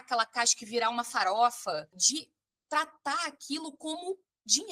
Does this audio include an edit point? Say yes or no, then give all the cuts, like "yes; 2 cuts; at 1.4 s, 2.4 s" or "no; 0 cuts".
yes; 1 cut; at 2.0 s